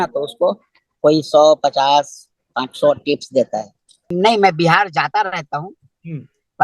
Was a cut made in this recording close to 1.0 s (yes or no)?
no